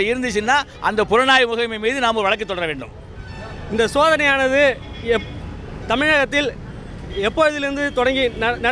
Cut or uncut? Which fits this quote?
uncut